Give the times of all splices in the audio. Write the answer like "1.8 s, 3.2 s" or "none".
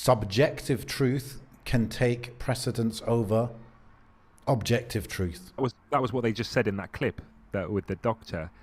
5.6 s